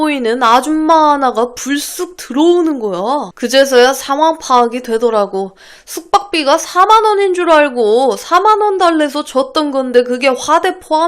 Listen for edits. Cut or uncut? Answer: cut